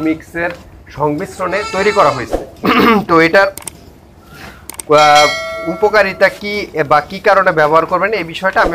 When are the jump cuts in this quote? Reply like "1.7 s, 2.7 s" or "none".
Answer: none